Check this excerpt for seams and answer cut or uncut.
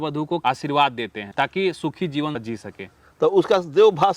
cut